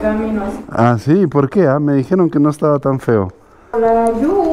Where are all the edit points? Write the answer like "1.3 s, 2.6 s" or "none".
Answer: 3.6 s